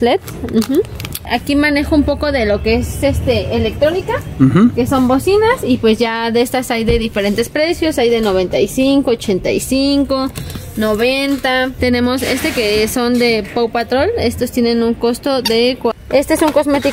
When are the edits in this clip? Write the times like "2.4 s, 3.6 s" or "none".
1.2 s, 11.7 s, 16.0 s